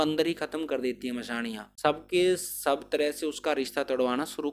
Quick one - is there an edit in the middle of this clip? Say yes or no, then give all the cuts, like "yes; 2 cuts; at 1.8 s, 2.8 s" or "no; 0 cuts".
yes; 1 cut; at 1.7 s